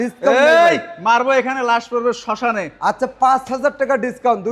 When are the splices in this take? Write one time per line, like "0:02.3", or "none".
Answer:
none